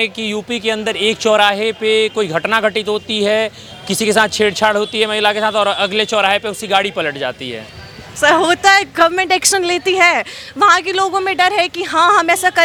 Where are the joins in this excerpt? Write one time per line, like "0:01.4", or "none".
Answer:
none